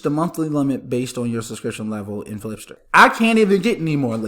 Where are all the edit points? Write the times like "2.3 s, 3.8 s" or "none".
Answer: 2.7 s